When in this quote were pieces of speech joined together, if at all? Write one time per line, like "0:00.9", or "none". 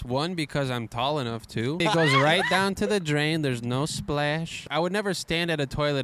0:01.8
0:04.7